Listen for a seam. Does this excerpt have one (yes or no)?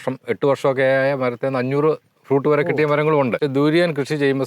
yes